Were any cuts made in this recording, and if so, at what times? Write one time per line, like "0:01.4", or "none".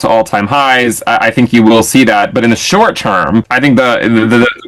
0:03.5